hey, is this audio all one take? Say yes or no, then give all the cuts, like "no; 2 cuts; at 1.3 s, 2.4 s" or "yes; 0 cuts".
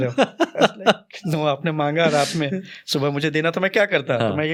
yes; 0 cuts